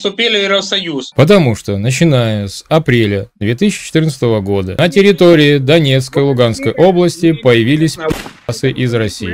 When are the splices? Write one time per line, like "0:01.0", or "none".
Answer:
0:01.0